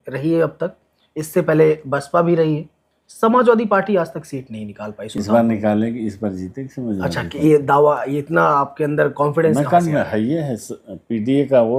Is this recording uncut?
yes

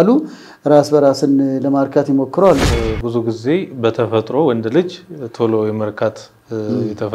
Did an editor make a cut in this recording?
yes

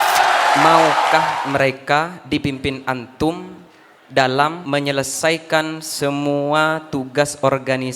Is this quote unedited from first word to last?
no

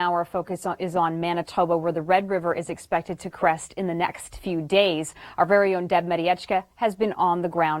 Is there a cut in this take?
no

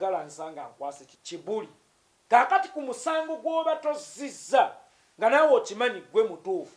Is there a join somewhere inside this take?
yes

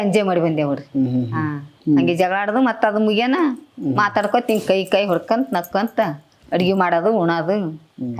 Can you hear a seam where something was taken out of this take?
yes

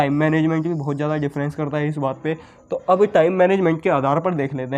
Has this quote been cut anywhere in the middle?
no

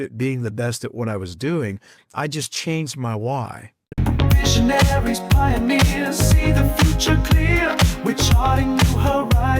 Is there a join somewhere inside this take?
yes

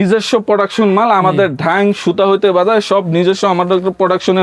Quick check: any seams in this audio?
no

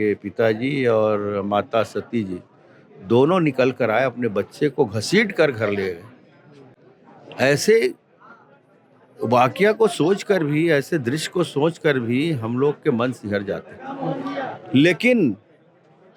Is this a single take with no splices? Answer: yes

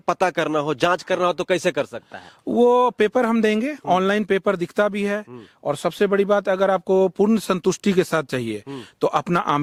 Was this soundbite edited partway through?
no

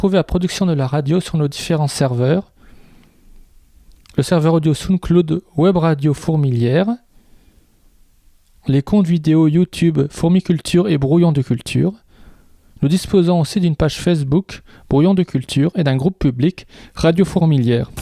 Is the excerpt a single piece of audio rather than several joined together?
yes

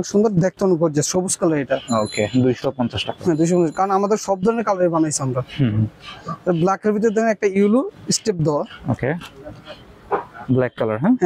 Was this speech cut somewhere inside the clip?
no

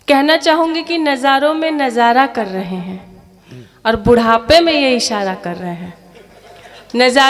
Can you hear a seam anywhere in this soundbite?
no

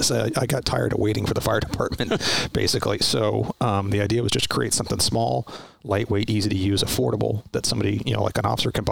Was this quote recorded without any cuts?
yes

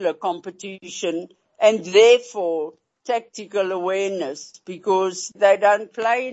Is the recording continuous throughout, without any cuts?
no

